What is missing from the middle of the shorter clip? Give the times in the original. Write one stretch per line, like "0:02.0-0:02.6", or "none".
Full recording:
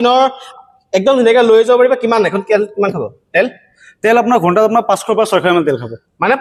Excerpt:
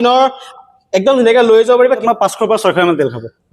0:02.0-0:04.7